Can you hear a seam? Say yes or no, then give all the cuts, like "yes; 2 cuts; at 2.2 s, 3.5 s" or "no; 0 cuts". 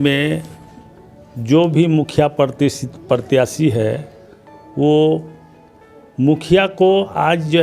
no; 0 cuts